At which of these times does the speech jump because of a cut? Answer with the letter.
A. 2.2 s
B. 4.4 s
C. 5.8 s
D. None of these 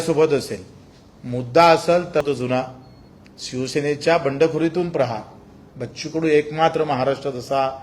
A